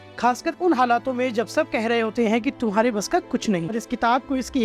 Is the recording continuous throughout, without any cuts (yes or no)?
no